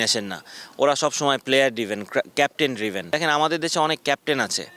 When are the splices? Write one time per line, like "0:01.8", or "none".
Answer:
0:03.1